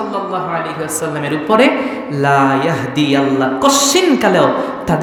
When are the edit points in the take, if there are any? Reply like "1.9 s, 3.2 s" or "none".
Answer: none

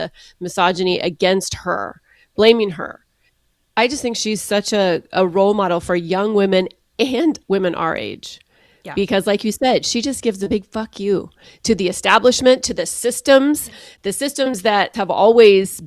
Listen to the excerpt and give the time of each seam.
7.4 s, 14.9 s

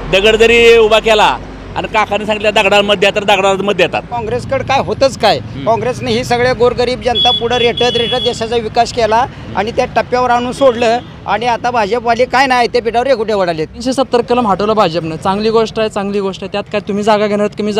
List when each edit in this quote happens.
4.2 s, 13.8 s

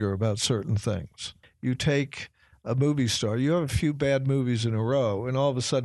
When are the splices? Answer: 1.4 s

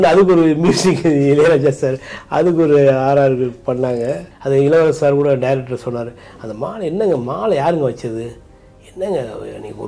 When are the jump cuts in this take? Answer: 4.3 s

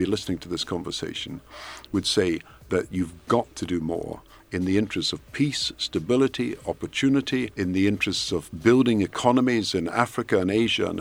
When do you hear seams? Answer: 2.5 s, 7.5 s

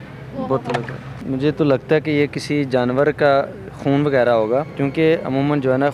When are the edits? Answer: 1.1 s, 4.7 s

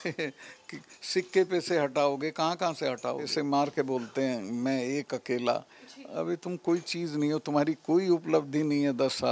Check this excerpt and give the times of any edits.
3.3 s

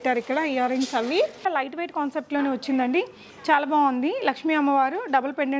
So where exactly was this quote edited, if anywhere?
1.5 s

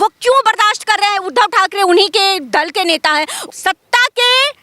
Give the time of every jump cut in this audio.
3.4 s

